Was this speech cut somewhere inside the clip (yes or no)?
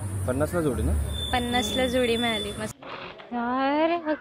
yes